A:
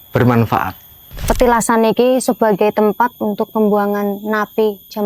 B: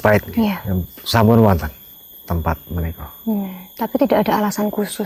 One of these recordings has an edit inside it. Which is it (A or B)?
A